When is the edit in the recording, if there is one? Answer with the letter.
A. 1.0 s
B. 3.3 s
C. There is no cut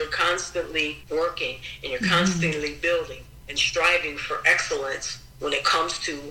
A